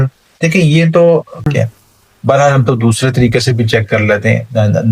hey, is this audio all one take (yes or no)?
no